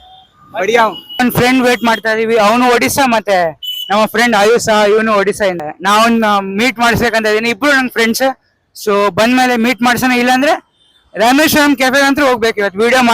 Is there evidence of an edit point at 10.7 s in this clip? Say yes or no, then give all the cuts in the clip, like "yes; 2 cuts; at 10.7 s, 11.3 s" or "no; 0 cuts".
no; 2 cuts; at 1.2 s, 5.6 s